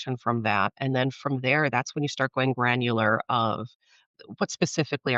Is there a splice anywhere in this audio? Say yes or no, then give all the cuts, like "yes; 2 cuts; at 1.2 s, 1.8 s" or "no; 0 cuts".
yes; 1 cut; at 4.0 s